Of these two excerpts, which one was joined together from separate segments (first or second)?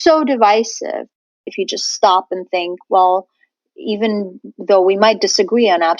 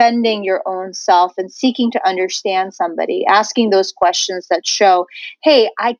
first